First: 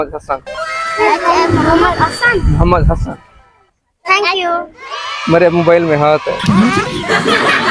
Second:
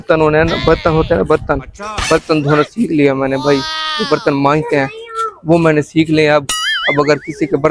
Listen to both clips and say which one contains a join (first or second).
first